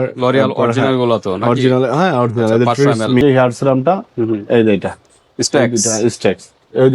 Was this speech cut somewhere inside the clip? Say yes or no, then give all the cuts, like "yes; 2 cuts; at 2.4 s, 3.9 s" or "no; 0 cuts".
yes; 1 cut; at 3.2 s